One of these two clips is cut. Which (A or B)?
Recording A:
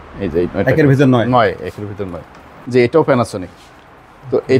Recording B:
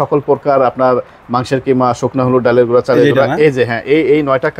A